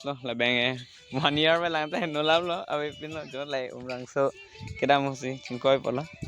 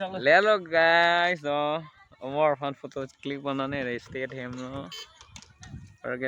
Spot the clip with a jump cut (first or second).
first